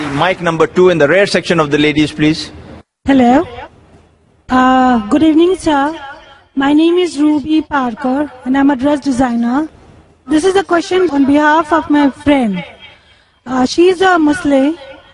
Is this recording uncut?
yes; 0 cuts

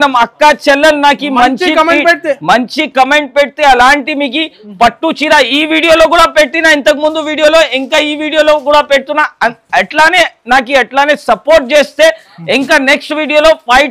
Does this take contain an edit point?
no; 0 cuts

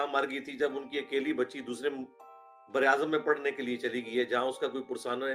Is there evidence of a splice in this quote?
no; 0 cuts

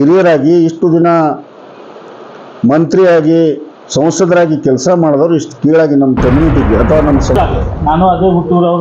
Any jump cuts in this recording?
yes; 1 cut; at 7.3 s

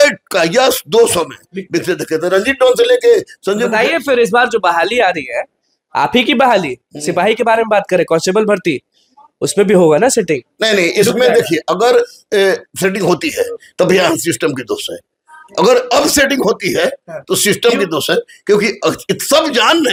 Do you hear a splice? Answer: no; 0 cuts

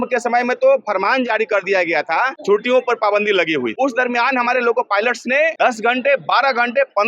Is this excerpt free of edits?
no; 3 cuts; at 2.3 s, 3.7 s, 5.5 s

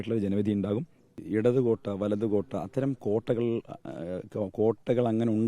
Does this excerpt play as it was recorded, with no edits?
no; 1 cut; at 1.2 s

